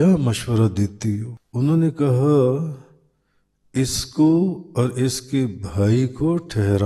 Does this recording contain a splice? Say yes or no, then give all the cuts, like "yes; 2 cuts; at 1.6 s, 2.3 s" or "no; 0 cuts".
yes; 1 cut; at 1.3 s